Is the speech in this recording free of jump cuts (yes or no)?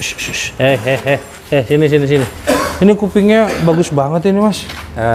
yes